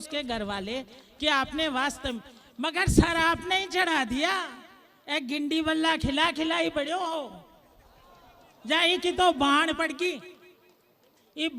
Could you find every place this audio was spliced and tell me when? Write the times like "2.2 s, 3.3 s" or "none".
none